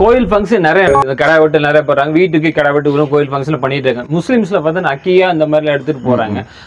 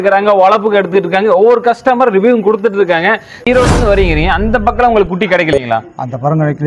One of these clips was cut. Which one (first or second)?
second